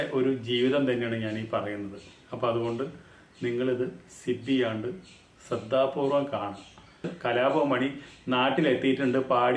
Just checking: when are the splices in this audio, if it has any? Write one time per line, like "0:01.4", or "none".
0:07.1